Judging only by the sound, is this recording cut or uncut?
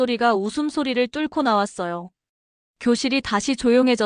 cut